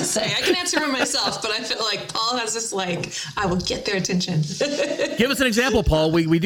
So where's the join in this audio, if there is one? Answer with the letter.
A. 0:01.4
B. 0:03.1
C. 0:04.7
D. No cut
D